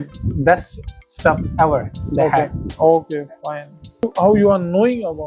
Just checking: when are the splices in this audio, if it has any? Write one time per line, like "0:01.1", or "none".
0:04.0